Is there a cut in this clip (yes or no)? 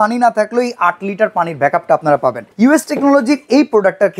yes